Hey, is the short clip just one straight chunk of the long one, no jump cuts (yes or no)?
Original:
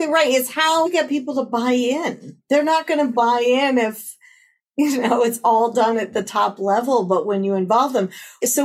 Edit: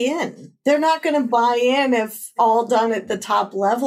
no